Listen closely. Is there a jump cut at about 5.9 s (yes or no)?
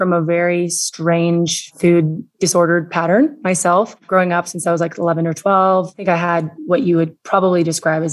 no